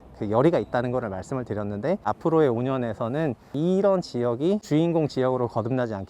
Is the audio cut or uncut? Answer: cut